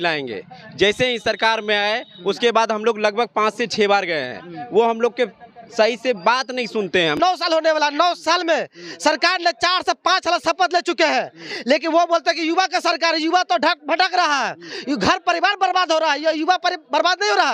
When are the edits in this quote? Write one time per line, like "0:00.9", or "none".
0:07.2

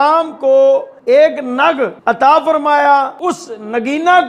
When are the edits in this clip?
0:00.9
0:02.0
0:03.1

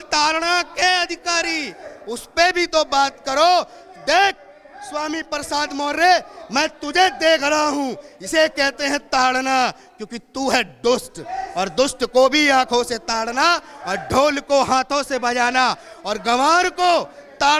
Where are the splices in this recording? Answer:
none

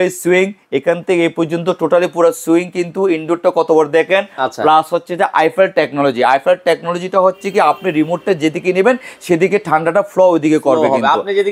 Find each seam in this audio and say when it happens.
none

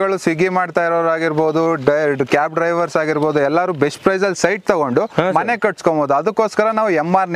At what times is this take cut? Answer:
none

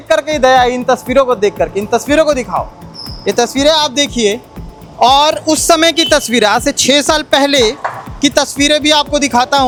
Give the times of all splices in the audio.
none

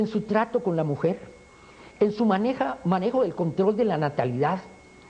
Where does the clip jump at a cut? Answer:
none

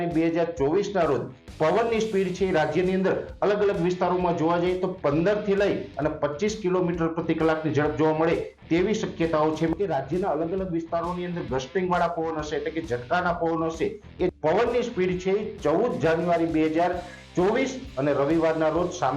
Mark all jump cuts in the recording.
0:09.7
0:14.3

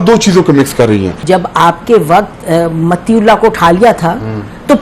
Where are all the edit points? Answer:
0:01.1

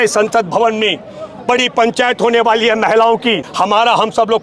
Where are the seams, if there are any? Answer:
0:03.5

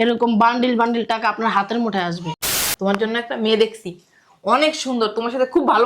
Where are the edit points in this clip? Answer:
0:02.5

